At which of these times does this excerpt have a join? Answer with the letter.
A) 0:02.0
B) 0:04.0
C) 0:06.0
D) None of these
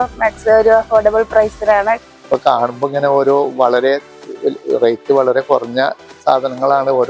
A